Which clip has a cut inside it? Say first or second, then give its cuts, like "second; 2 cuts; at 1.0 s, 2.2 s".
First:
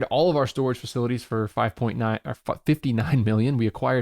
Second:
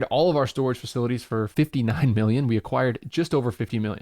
second; 1 cut; at 1.5 s